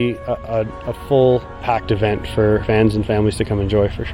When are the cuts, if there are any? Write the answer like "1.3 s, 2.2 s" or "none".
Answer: 1.6 s, 2.6 s